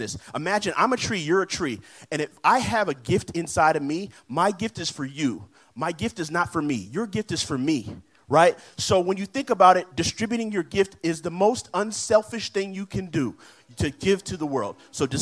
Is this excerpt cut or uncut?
uncut